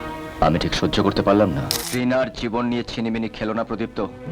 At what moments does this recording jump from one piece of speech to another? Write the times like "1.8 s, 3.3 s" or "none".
1.8 s